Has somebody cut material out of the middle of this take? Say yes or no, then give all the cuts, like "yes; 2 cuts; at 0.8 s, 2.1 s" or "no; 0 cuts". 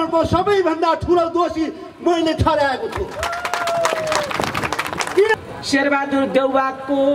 yes; 1 cut; at 5.3 s